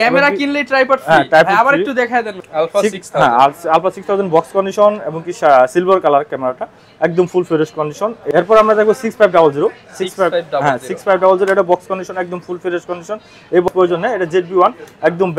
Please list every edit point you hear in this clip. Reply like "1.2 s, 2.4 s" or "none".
2.4 s, 8.2 s, 13.7 s